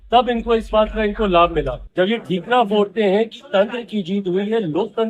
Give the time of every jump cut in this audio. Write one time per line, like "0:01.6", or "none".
0:01.8